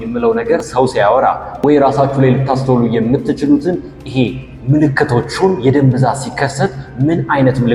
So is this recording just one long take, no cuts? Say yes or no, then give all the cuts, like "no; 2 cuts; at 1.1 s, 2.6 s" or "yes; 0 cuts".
yes; 0 cuts